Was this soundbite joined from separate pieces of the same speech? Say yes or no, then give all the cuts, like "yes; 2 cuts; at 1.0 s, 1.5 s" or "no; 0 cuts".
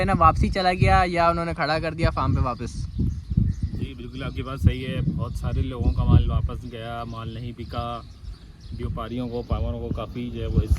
no; 0 cuts